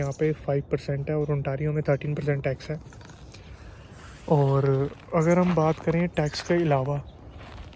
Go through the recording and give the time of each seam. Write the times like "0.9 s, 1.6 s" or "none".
none